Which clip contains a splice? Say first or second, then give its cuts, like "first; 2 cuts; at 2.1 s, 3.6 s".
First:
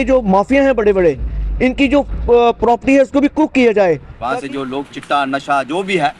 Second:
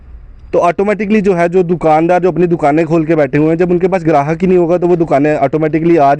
first; 1 cut; at 4.1 s